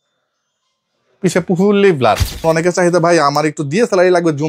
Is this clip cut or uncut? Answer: cut